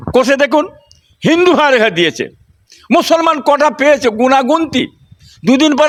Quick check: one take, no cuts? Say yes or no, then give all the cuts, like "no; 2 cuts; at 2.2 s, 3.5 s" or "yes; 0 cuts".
yes; 0 cuts